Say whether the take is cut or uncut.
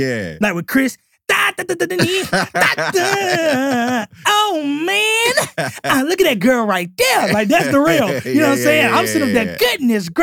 uncut